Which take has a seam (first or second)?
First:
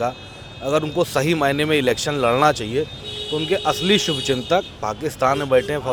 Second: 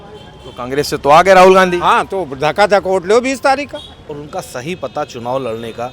second